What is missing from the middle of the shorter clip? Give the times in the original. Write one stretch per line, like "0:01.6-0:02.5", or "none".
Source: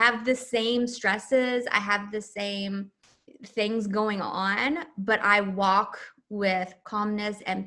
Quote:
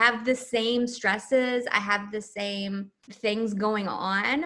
0:03.0-0:03.3